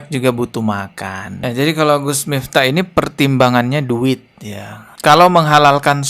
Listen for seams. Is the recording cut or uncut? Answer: cut